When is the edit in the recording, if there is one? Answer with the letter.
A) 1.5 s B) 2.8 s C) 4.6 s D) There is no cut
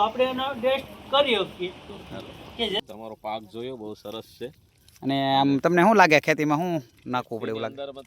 B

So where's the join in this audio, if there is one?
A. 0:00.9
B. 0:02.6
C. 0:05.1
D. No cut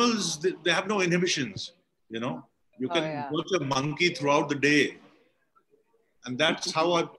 B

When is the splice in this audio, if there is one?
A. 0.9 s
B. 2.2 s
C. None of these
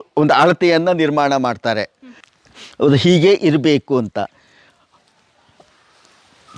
C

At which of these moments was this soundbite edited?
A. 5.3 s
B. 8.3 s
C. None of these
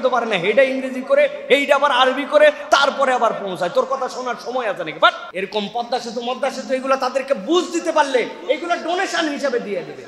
A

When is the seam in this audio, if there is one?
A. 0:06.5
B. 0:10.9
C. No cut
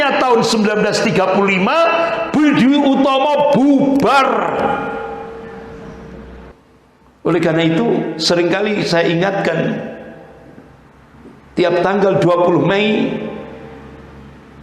A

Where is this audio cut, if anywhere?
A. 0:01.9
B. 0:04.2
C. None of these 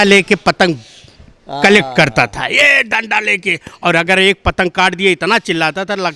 C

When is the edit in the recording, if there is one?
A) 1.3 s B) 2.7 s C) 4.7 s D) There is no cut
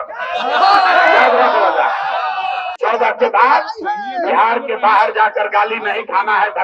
B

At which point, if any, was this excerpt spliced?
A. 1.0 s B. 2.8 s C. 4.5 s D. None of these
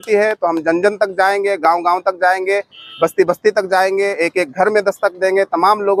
D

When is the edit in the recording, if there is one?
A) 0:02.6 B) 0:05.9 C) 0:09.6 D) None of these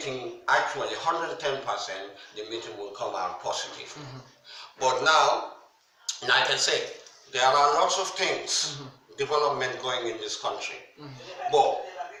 D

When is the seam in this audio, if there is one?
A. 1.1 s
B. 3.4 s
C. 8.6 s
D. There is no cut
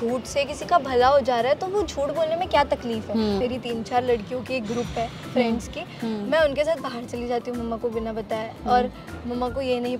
B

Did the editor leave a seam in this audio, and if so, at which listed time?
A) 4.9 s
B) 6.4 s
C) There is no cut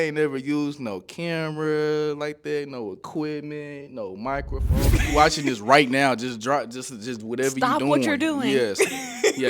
A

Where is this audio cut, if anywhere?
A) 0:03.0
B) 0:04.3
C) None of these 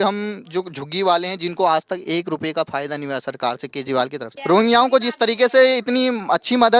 B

